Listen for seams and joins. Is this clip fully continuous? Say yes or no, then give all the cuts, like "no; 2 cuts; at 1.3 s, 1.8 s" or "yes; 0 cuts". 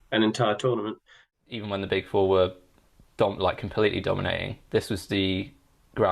no; 1 cut; at 1.2 s